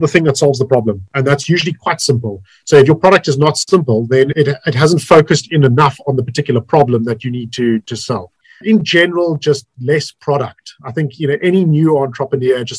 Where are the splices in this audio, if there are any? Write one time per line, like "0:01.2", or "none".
0:08.4